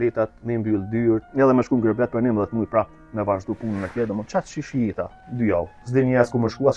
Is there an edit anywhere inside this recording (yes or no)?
yes